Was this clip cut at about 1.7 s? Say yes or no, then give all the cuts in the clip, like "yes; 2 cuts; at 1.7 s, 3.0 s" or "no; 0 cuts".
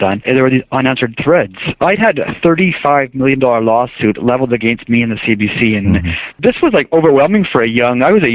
yes; 2 cuts; at 1.7 s, 6.4 s